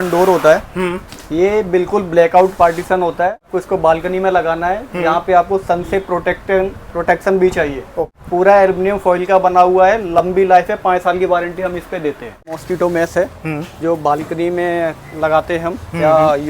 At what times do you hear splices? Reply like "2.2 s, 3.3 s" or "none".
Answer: 3.5 s, 8.0 s, 12.5 s